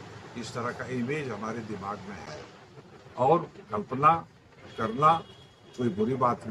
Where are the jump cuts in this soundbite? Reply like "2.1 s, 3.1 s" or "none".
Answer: none